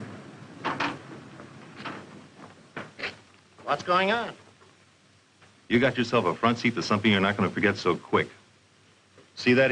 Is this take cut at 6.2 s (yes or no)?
no